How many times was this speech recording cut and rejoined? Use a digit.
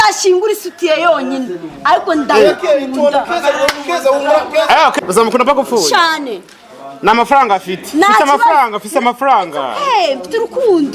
1